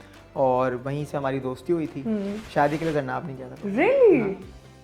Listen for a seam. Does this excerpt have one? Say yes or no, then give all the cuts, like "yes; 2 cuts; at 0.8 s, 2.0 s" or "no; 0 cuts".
yes; 1 cut; at 2.4 s